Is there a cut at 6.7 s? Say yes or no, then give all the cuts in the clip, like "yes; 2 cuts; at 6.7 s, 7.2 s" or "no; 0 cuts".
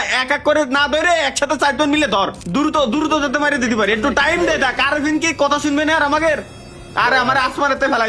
no; 1 cut; at 2.4 s